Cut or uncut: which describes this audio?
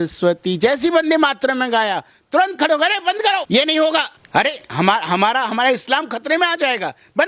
cut